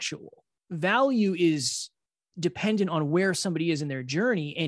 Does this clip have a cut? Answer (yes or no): no